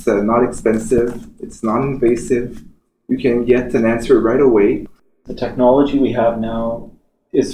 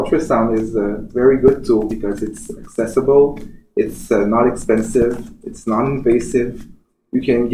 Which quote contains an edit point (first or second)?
first